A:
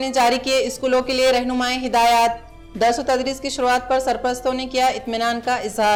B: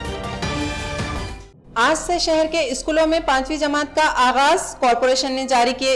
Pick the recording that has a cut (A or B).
B